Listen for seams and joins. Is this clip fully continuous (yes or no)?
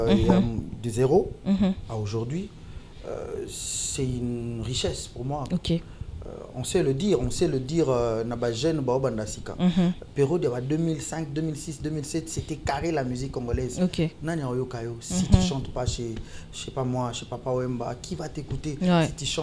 yes